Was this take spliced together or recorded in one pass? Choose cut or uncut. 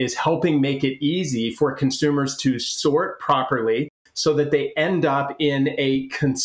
cut